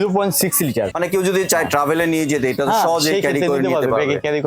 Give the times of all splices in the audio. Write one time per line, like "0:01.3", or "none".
0:00.9